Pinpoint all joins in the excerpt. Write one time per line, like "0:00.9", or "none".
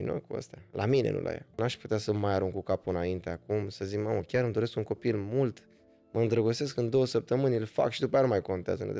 0:01.6